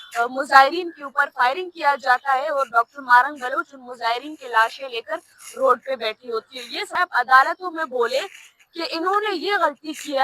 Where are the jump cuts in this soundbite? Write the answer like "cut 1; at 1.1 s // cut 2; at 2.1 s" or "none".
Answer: cut 1; at 7.0 s